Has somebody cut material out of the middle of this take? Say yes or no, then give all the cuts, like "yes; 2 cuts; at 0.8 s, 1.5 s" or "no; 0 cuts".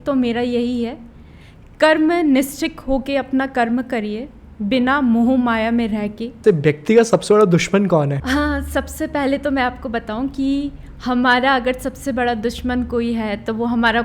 yes; 1 cut; at 6.4 s